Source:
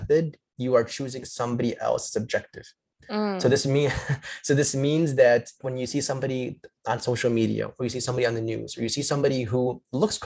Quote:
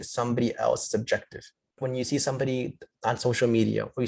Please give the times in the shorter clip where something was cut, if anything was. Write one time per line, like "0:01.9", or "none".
0:01.7